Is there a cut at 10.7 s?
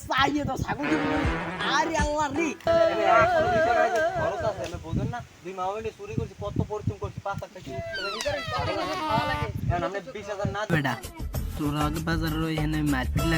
yes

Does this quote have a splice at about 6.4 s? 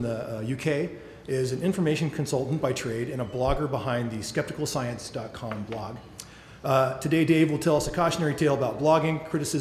no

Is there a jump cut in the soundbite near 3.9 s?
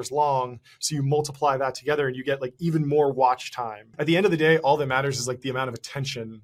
yes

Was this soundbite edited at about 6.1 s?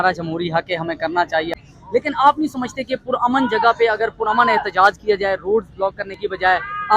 no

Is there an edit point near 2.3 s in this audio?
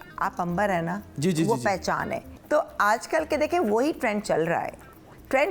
yes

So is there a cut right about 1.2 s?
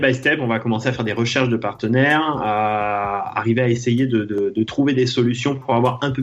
no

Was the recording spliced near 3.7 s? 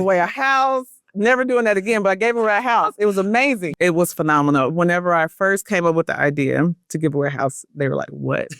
yes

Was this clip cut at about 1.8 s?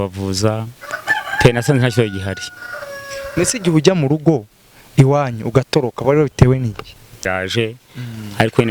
no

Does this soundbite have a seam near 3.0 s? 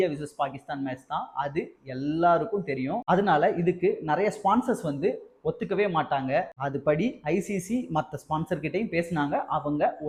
no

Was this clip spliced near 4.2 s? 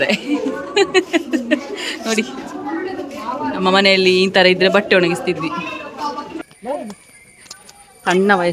no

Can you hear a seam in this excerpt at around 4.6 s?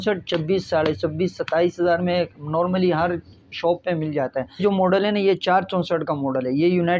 yes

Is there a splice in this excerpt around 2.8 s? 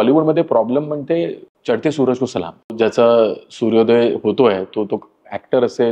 yes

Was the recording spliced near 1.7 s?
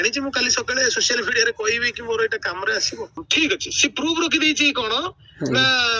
no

